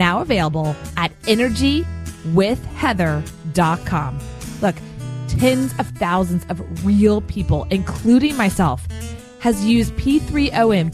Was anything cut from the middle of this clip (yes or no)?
no